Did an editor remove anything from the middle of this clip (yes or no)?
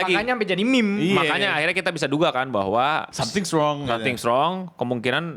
no